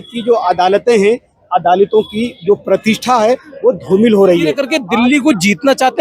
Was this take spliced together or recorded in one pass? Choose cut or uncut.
cut